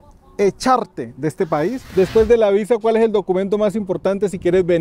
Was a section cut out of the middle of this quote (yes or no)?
yes